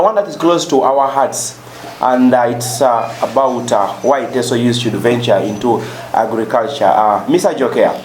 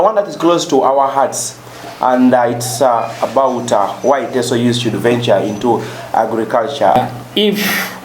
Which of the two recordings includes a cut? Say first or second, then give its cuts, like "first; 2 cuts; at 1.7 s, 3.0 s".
second; 1 cut; at 6.9 s